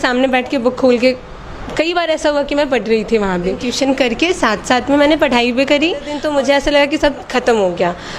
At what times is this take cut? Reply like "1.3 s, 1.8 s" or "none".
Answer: 3.7 s, 6.1 s

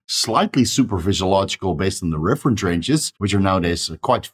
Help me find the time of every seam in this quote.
3.1 s

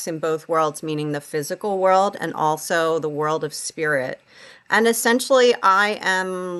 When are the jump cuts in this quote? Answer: none

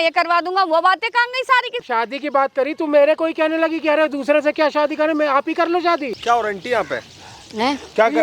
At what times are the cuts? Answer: 1.8 s, 6.1 s

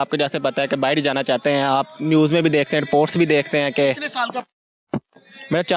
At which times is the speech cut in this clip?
none

